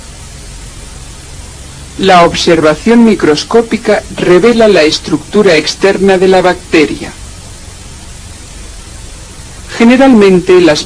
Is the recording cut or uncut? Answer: cut